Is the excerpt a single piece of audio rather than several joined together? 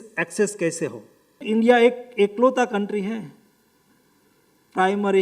no; 1 cut; at 1.4 s

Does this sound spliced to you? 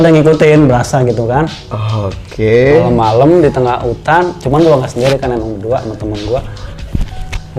no; 0 cuts

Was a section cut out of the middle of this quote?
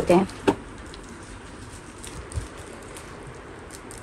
no; 0 cuts

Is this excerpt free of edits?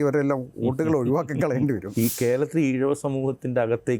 no; 1 cut; at 1.9 s

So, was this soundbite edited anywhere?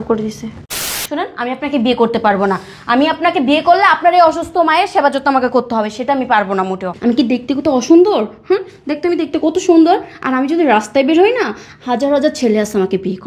yes; 2 cuts; at 0.9 s, 6.9 s

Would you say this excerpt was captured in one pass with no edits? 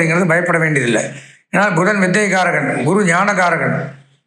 yes; 0 cuts

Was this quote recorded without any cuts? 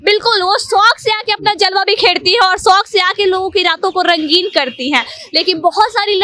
yes; 0 cuts

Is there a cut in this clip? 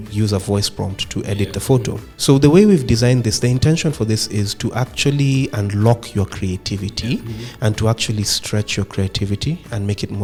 no; 0 cuts

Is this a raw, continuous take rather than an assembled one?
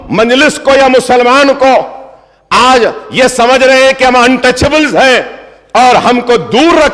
yes; 0 cuts

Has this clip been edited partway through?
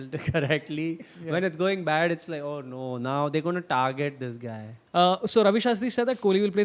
yes; 1 cut; at 4.8 s

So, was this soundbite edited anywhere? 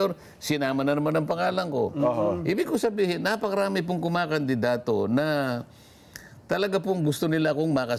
no; 0 cuts

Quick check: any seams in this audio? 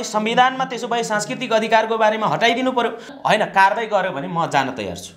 yes; 1 cut; at 3.1 s

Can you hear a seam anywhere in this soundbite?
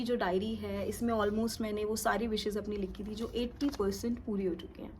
no; 0 cuts

